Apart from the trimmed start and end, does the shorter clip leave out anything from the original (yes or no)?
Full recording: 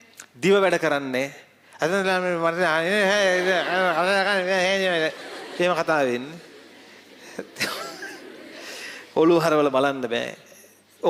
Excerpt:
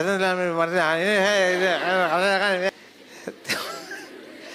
yes